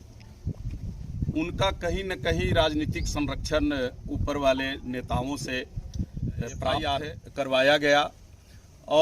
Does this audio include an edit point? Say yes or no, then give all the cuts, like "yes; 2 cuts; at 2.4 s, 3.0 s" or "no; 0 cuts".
yes; 1 cut; at 6.8 s